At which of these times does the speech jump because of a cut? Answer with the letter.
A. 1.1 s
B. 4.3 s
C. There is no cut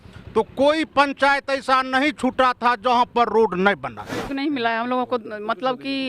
B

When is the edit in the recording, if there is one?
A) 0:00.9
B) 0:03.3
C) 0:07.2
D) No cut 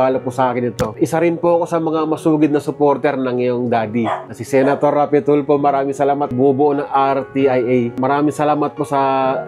A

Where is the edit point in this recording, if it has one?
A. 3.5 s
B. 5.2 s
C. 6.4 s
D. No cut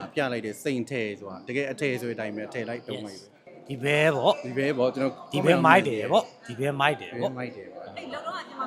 A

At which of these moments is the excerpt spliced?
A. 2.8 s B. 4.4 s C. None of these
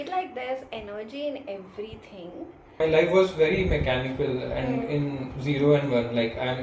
A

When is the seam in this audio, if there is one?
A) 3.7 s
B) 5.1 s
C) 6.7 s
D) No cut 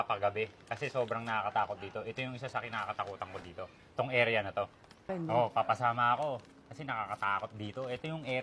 B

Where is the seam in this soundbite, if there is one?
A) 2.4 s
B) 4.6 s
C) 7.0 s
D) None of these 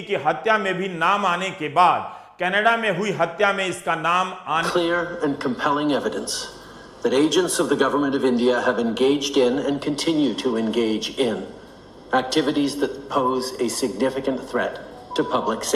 B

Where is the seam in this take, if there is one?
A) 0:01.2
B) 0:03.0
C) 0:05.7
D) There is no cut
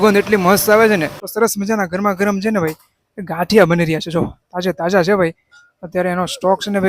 A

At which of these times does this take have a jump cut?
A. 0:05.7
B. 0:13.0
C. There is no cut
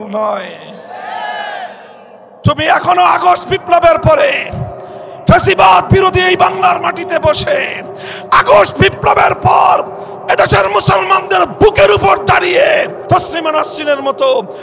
B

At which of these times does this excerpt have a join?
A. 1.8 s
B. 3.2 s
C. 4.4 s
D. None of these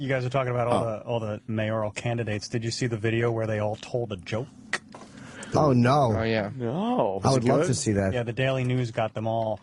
C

